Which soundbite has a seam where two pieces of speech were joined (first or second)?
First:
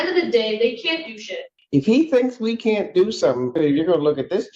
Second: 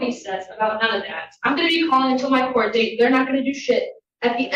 first